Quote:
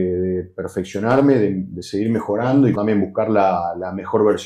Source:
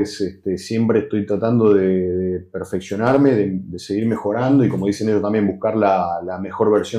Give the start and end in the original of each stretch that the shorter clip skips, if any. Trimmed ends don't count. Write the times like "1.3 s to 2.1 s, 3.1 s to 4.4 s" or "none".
4.7 s to 5.2 s